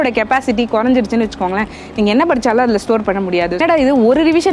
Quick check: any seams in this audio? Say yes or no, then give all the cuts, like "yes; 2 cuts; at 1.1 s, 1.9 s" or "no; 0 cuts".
yes; 1 cut; at 3.6 s